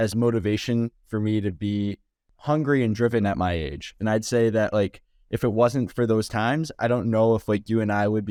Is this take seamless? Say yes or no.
yes